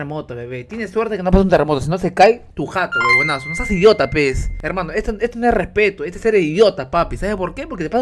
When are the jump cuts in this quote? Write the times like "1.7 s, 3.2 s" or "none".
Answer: 2.5 s, 4.5 s